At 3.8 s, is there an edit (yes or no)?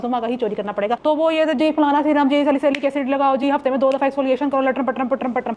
no